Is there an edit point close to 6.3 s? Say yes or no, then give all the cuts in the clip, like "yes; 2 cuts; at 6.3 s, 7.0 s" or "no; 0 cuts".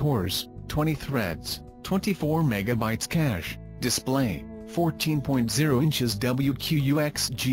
no; 1 cut; at 3.6 s